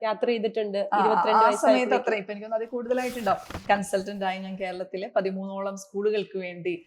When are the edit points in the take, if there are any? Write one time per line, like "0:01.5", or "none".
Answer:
0:03.5

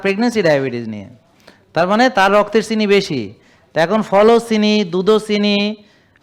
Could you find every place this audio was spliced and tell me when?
none

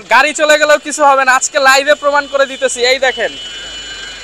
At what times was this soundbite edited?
none

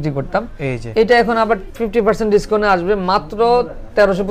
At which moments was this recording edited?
none

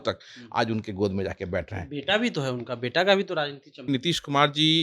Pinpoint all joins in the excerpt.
0:03.9

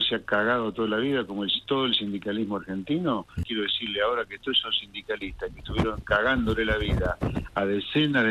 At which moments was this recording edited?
0:03.4

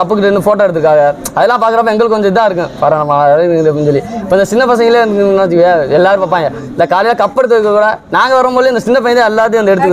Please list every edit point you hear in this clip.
none

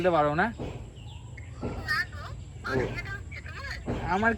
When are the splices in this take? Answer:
none

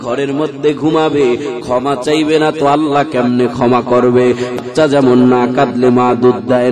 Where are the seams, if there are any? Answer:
0:04.7

